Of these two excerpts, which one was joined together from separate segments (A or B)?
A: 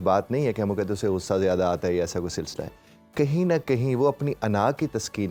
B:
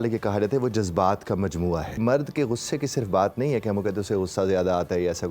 B